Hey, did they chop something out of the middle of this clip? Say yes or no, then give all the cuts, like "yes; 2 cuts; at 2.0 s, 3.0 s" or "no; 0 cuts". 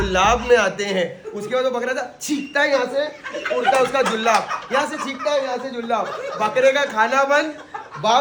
no; 0 cuts